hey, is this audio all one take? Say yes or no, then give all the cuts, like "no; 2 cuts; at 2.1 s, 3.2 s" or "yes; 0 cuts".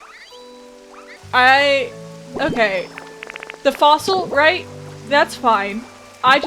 no; 1 cut; at 1.2 s